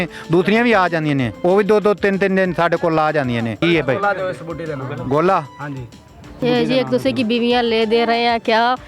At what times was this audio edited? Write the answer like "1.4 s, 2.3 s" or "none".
1.3 s, 3.6 s, 6.4 s